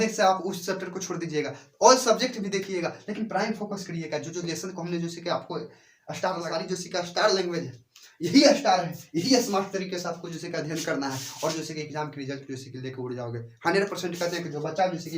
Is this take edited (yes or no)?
yes